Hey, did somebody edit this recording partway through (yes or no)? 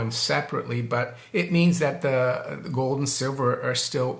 no